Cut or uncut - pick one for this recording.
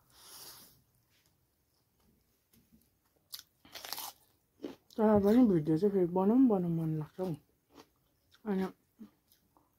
cut